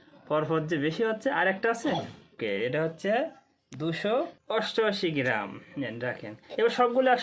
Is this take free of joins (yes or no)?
no